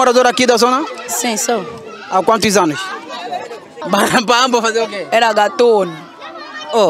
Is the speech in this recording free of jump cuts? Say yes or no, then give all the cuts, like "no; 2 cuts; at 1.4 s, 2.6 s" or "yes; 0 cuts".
no; 1 cut; at 3.8 s